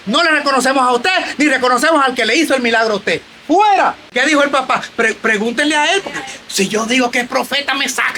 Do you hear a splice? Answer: yes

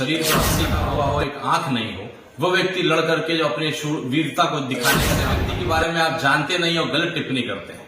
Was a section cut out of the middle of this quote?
yes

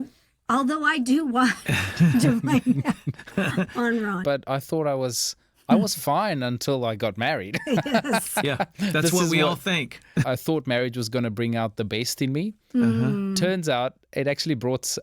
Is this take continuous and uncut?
no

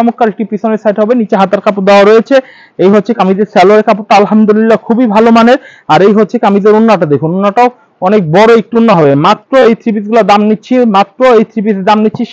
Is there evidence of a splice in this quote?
no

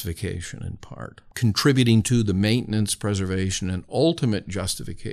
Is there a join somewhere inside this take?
yes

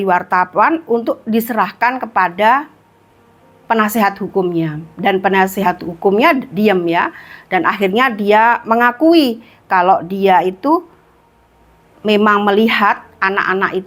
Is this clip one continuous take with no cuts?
yes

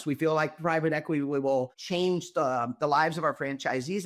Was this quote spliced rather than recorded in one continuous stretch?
yes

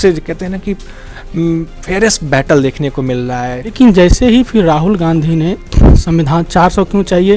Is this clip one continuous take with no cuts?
no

